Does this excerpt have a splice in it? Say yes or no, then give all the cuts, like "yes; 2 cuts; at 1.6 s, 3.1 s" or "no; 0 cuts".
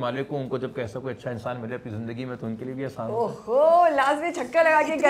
no; 0 cuts